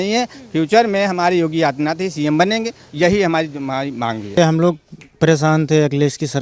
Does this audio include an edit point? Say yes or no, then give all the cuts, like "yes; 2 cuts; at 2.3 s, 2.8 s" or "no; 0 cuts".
yes; 1 cut; at 4.4 s